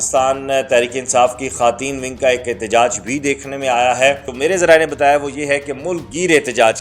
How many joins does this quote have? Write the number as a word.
one